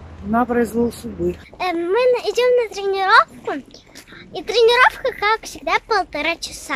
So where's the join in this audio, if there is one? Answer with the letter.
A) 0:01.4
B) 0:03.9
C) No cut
A